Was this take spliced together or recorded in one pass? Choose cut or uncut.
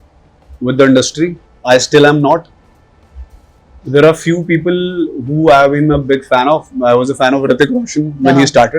cut